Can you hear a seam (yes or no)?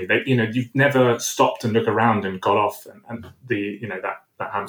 no